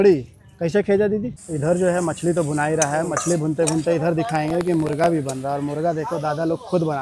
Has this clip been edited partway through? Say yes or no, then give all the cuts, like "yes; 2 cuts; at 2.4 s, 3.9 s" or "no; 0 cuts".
yes; 1 cut; at 1.4 s